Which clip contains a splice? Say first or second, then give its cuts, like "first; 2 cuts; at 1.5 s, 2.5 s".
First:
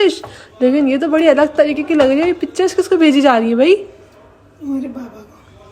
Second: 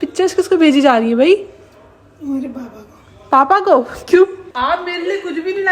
second; 1 cut; at 4.4 s